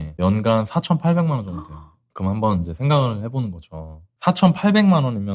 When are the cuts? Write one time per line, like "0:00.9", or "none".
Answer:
none